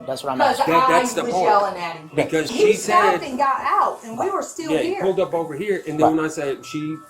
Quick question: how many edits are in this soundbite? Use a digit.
1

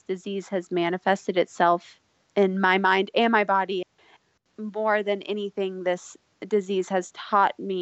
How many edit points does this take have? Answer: 1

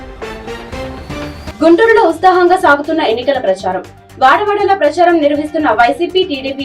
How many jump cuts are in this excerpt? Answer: 0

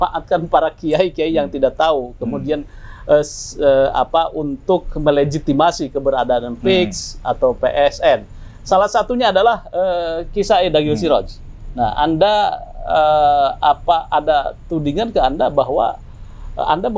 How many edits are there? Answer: 0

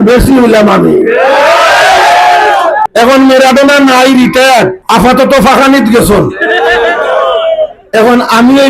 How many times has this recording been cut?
2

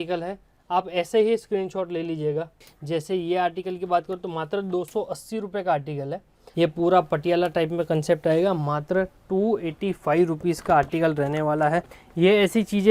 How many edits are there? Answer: 3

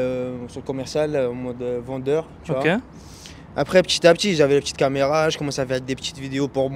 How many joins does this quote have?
0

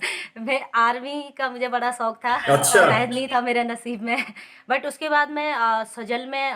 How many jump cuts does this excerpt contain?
1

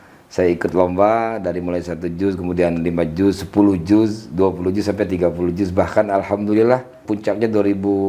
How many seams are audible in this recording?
1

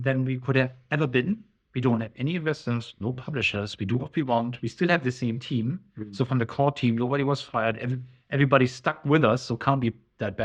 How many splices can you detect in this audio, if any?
0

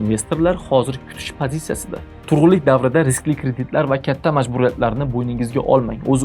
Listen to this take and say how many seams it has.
1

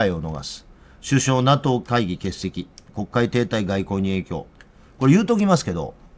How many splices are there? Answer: 0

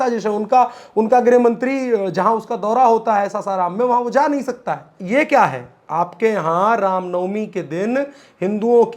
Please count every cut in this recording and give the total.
1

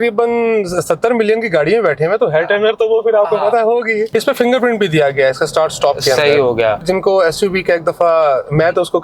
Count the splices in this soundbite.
2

